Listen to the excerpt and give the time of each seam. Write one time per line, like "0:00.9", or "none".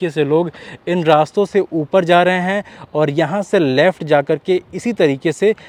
none